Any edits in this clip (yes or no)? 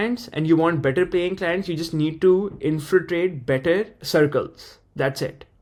no